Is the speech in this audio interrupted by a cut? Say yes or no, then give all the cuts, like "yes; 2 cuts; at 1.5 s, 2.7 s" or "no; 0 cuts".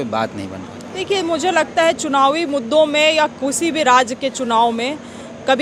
no; 0 cuts